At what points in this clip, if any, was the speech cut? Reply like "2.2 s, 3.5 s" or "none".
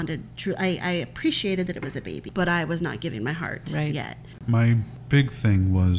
2.2 s, 4.4 s

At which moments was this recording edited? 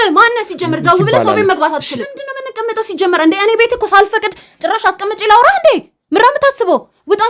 2.0 s

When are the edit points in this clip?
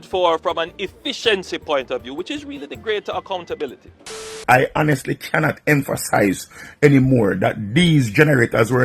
4.4 s

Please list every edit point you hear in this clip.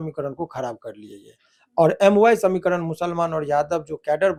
none

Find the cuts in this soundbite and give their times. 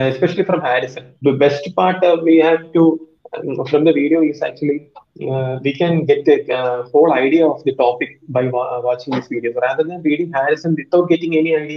1.1 s

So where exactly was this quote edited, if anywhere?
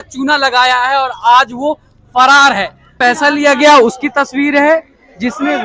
3.0 s

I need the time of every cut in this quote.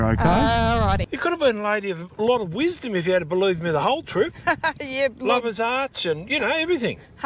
1.1 s

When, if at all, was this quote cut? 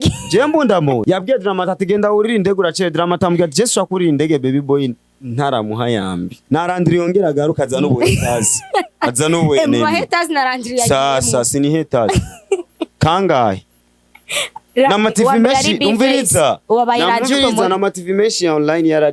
1.0 s, 6.4 s

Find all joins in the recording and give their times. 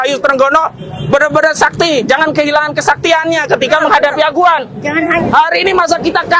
5.2 s

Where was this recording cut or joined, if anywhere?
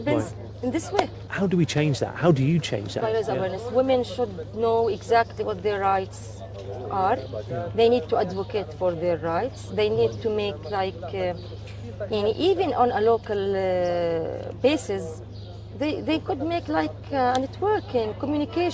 1.3 s, 3.0 s

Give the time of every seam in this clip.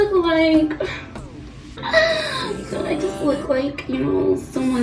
none

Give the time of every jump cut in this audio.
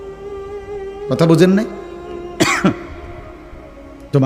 1.1 s

